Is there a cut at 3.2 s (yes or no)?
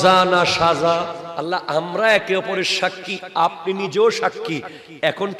no